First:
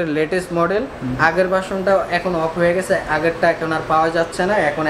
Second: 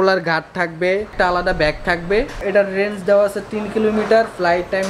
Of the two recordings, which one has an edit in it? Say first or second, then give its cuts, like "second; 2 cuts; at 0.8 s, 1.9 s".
second; 2 cuts; at 1.1 s, 2.4 s